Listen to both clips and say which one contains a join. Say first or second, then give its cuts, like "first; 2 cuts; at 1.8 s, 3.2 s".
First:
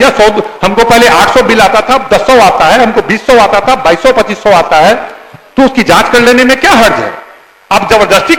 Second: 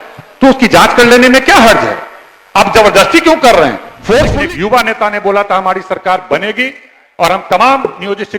second; 1 cut; at 4.3 s